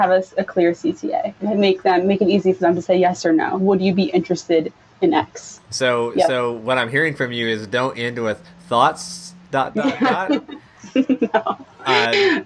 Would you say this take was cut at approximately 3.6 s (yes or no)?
yes